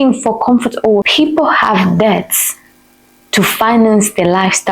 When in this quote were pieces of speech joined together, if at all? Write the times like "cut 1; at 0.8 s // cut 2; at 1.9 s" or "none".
cut 1; at 1.1 s